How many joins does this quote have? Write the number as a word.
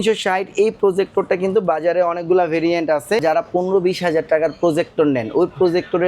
one